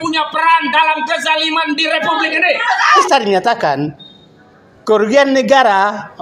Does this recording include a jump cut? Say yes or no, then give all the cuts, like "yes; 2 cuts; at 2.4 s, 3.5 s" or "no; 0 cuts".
yes; 1 cut; at 3.0 s